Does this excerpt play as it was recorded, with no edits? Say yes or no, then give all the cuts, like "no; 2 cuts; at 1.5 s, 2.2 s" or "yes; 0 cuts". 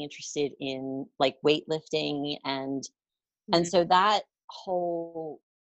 yes; 0 cuts